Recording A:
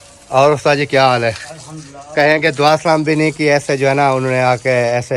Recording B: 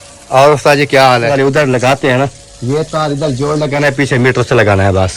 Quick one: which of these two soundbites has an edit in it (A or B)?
B